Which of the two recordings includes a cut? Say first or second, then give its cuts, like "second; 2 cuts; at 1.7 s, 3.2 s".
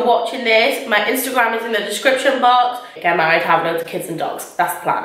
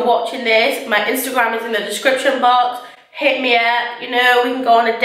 first; 1 cut; at 2.9 s